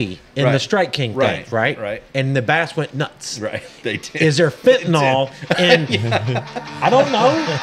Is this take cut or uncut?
uncut